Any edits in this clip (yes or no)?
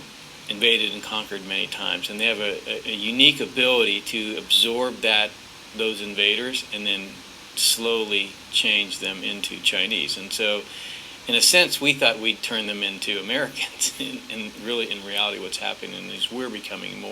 yes